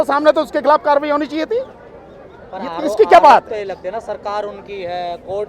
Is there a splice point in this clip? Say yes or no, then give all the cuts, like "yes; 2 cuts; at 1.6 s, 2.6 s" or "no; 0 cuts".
no; 0 cuts